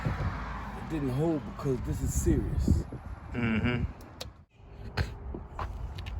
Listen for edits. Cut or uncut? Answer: cut